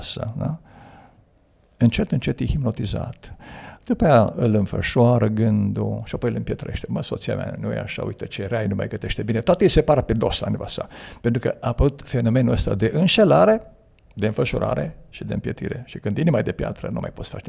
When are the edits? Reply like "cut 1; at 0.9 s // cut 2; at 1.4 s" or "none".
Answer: none